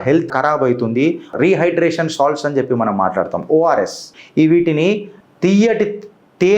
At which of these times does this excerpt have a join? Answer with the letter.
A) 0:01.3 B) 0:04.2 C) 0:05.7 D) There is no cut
A